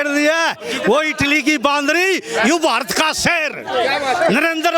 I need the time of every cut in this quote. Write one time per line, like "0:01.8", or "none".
none